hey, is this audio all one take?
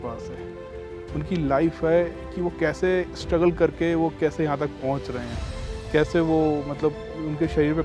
yes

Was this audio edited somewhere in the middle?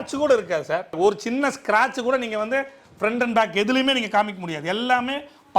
yes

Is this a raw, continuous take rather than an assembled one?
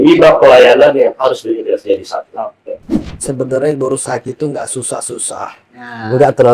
no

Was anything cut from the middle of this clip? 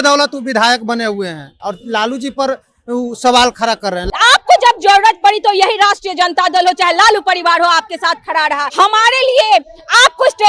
yes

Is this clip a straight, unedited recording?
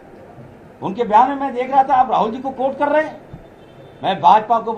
yes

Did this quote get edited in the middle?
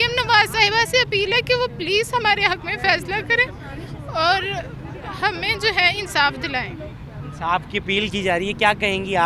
no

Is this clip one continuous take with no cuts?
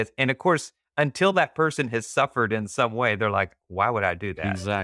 yes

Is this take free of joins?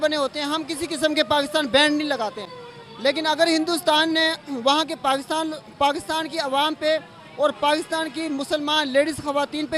yes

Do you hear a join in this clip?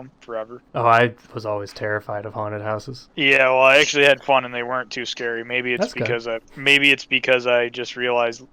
no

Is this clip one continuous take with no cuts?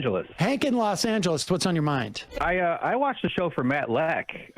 no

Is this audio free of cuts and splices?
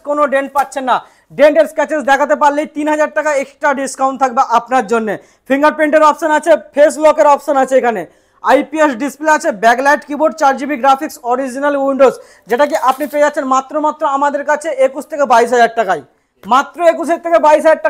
yes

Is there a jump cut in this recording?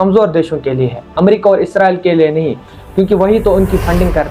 no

